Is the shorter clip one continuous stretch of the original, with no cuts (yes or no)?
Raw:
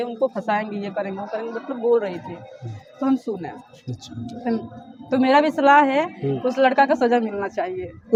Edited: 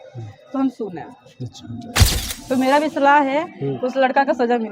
no